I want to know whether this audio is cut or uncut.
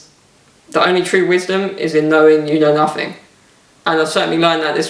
uncut